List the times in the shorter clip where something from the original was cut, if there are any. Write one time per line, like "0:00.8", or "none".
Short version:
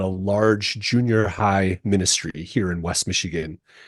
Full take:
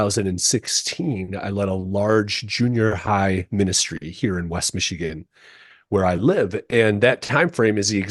none